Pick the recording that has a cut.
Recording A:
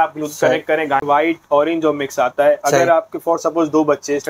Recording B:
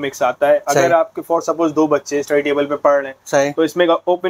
A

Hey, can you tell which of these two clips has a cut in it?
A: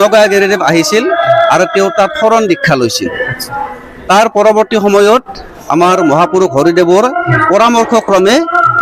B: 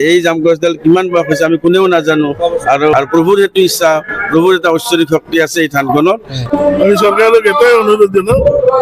B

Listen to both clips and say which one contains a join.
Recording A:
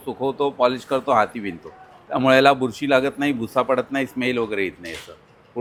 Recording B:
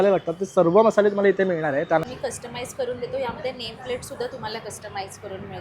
B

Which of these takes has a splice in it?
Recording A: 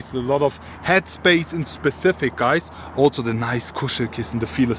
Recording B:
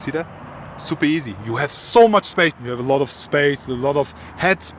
B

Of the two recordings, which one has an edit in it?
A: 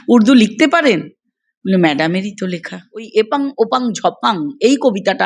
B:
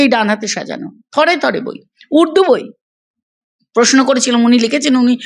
A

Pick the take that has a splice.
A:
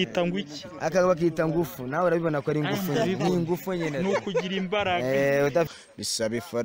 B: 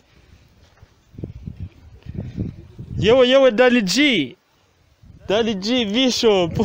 A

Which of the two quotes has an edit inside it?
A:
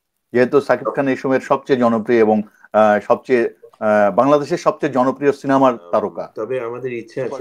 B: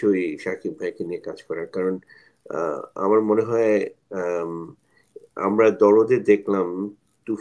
A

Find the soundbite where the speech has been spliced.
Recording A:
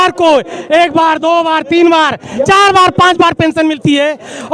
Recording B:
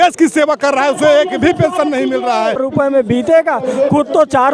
B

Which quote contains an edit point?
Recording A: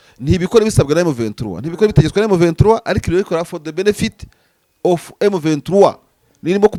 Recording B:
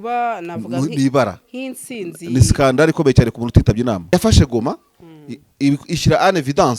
B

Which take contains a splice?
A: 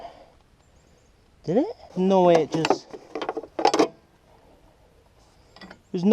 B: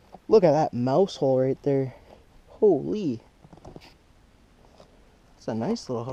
A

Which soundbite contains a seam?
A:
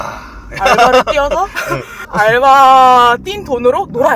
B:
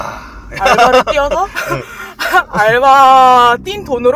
A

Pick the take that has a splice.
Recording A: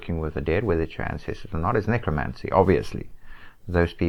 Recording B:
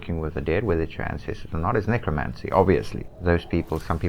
B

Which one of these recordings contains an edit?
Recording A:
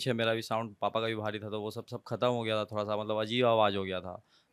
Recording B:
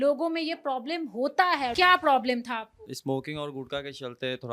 B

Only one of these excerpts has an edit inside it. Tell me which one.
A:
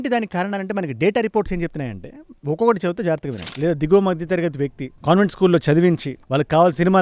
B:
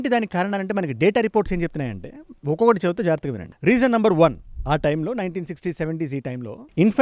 A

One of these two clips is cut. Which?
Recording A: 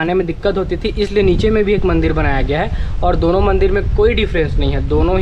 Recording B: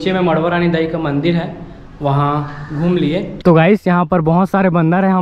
B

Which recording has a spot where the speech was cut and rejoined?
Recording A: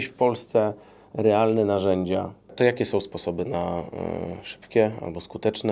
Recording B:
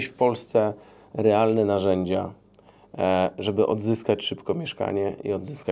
A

